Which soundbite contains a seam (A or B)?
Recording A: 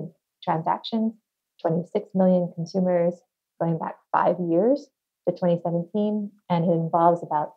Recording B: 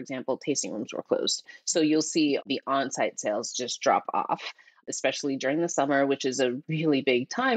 B